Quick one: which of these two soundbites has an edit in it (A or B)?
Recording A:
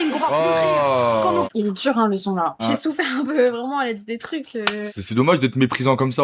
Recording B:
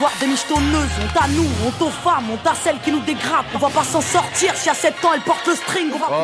A